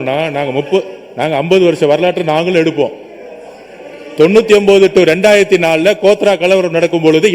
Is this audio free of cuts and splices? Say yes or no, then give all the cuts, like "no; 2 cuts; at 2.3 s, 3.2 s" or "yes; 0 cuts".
yes; 0 cuts